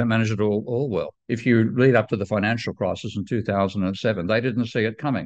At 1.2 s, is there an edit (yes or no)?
yes